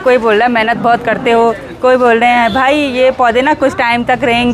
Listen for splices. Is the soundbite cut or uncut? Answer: uncut